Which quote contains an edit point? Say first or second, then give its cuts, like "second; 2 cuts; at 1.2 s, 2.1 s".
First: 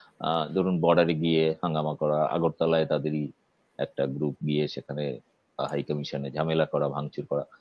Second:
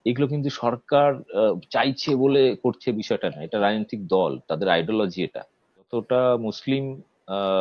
second; 1 cut; at 5.9 s